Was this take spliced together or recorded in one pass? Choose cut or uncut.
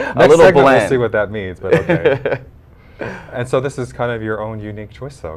uncut